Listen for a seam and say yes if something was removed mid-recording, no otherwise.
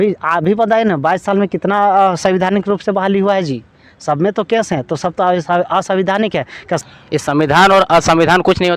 yes